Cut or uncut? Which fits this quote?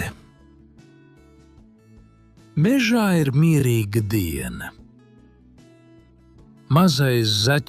uncut